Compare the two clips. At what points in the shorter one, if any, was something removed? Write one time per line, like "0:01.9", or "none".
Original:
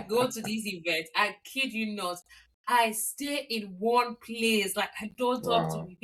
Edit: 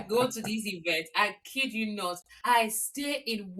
0:02.3